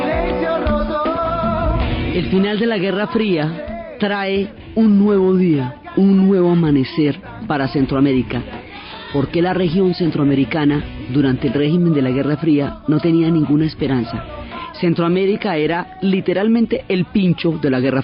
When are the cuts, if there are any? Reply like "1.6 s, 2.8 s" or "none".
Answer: none